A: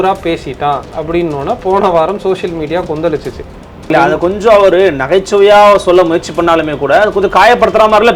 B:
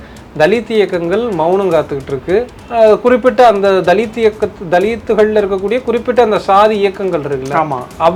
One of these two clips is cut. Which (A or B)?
A